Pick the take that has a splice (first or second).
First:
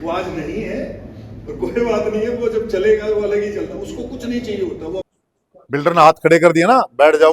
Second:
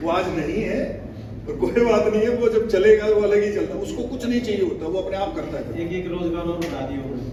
first